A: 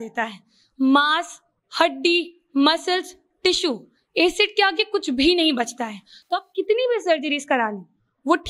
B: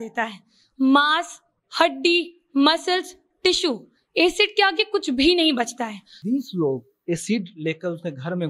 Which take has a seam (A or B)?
B